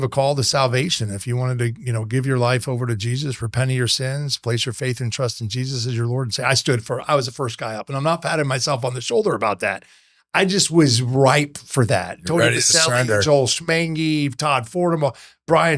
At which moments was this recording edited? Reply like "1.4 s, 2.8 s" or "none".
none